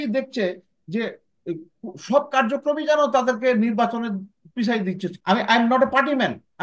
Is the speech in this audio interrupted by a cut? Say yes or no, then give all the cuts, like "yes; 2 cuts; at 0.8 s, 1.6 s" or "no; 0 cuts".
yes; 1 cut; at 5.1 s